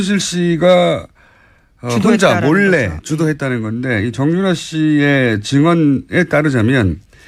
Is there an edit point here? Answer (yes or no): no